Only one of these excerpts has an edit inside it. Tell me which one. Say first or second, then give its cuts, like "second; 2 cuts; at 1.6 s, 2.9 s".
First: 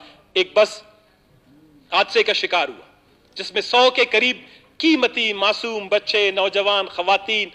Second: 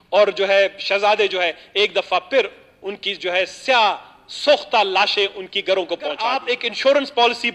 second; 1 cut; at 6.5 s